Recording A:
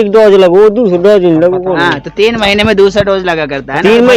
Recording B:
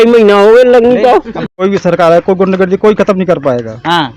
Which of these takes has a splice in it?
B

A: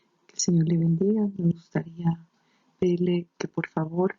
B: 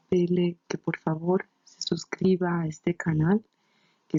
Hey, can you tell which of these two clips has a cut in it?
A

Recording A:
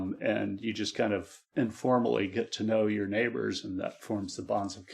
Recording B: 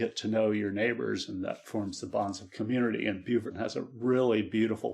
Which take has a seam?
B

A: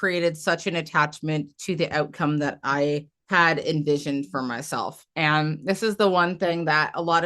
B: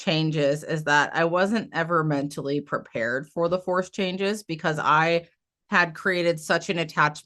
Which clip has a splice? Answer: A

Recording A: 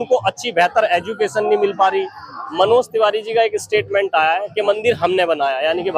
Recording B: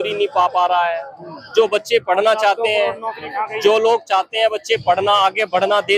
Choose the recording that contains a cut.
A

